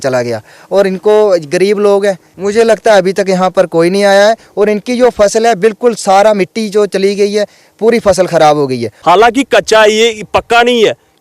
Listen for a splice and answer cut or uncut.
cut